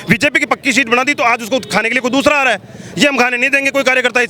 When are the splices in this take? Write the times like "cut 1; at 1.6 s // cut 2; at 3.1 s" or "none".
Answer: none